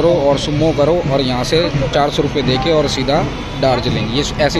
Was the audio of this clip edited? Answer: no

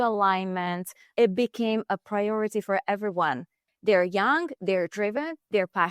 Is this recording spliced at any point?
yes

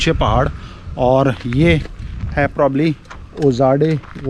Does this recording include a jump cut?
no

